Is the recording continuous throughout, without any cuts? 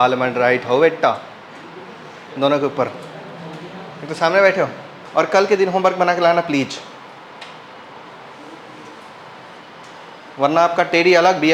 no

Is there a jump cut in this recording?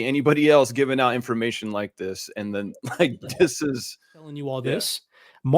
yes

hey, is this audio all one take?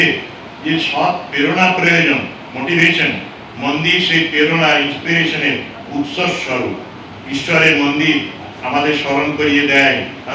yes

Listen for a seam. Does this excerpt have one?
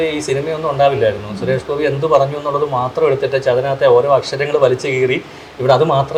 no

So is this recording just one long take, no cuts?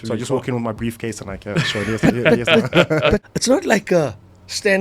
no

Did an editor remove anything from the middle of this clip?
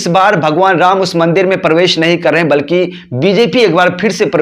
no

